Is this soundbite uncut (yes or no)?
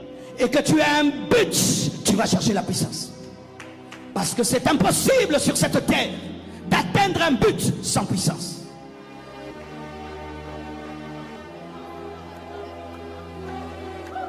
no